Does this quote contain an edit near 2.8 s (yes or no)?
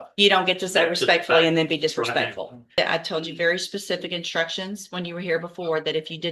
yes